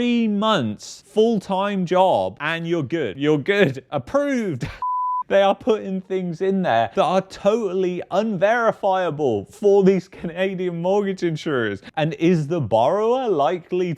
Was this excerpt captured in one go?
no; 1 cut; at 5.2 s

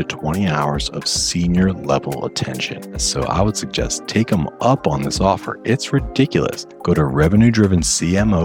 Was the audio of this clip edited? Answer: yes; 2 cuts; at 3.0 s, 6.7 s

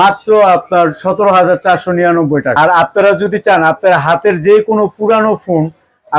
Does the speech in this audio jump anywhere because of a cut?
yes; 1 cut; at 2.5 s

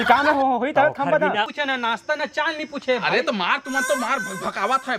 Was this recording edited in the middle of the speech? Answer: yes; 1 cut; at 1.5 s

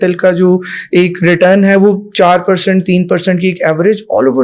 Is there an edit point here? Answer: no; 0 cuts

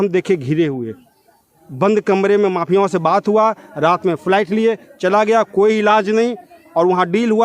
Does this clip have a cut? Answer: no; 0 cuts

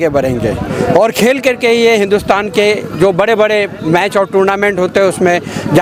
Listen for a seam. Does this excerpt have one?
no; 0 cuts

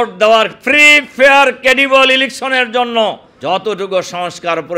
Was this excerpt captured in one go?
no; 1 cut; at 3.3 s

